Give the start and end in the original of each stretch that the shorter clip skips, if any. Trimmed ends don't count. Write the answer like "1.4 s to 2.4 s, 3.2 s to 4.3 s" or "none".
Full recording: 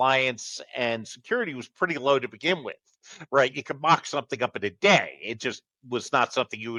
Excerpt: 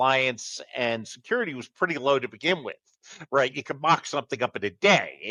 none